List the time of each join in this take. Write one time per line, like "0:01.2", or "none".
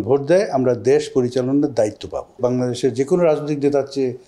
0:02.4